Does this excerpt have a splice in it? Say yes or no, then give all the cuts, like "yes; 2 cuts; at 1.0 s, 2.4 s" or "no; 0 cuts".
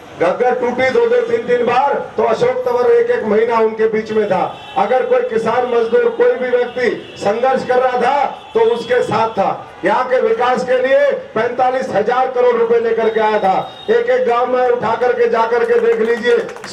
no; 0 cuts